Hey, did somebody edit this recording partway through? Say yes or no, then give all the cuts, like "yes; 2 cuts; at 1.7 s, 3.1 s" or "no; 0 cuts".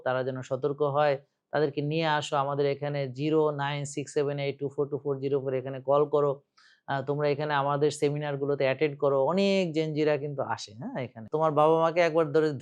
yes; 1 cut; at 11.2 s